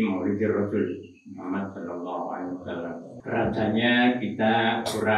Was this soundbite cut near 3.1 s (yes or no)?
yes